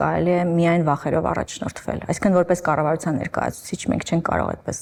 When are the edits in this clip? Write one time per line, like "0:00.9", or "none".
none